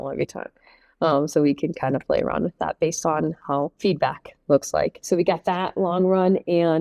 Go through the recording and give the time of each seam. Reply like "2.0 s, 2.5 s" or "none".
3.7 s, 5.0 s